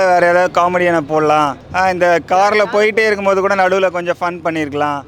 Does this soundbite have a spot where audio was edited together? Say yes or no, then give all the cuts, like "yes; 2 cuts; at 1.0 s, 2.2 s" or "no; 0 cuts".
no; 0 cuts